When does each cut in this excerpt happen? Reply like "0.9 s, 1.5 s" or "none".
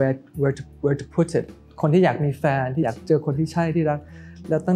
1.7 s, 2.8 s